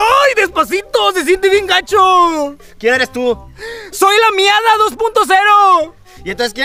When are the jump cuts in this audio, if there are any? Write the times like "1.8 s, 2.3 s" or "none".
none